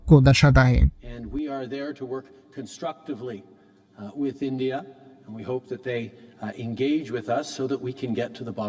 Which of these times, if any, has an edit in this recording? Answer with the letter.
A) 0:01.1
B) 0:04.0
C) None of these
A